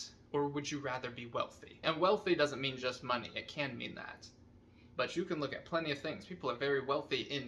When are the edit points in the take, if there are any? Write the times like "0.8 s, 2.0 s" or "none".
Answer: 1.8 s